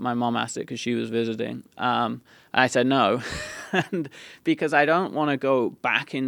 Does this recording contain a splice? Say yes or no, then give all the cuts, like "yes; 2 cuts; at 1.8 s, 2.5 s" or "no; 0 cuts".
no; 0 cuts